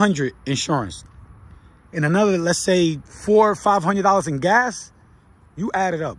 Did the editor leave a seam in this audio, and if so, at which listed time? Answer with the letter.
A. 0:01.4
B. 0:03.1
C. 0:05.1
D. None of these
D